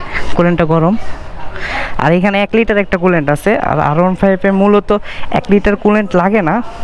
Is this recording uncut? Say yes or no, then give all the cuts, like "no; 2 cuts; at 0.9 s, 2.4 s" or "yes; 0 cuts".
yes; 0 cuts